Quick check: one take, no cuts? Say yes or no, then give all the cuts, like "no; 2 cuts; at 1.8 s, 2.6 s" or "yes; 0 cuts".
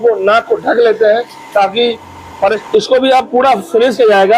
no; 1 cut; at 2.6 s